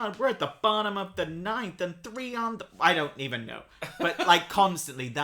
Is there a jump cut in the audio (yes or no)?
no